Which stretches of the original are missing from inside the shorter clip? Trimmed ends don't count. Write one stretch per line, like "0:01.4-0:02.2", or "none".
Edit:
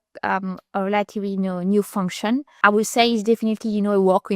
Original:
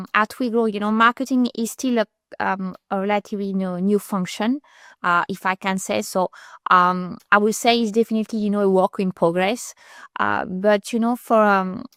0:04.7-0:07.2